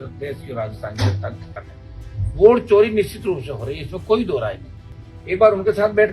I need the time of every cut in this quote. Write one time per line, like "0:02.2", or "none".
0:01.6
0:04.9